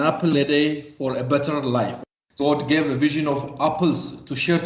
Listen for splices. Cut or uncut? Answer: cut